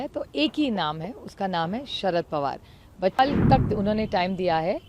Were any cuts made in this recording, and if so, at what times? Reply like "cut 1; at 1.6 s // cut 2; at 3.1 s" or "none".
cut 1; at 3.2 s

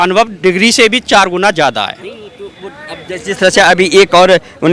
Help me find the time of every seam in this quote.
none

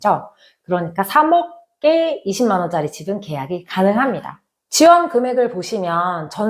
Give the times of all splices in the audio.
none

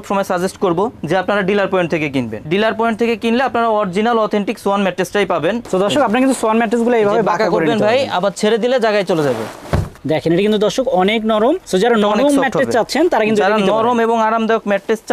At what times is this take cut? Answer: cut 1; at 2.4 s // cut 2; at 5.6 s // cut 3; at 10.0 s

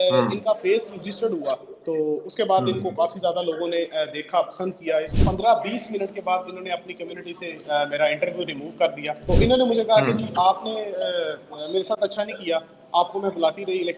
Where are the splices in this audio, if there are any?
cut 1; at 5.2 s // cut 2; at 9.1 s

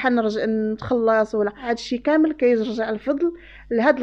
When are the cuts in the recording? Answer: cut 1; at 1.6 s

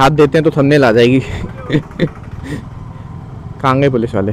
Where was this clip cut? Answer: none

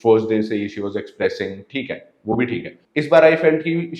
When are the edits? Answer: cut 1; at 2.8 s

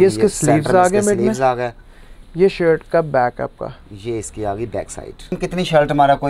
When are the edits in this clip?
cut 1; at 5.4 s

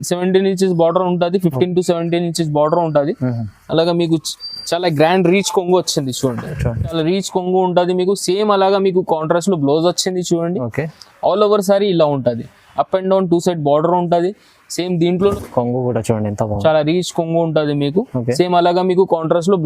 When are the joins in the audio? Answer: cut 1; at 6.9 s // cut 2; at 15.3 s

